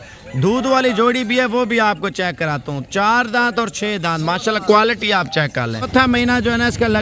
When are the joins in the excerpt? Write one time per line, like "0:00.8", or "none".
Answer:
0:05.9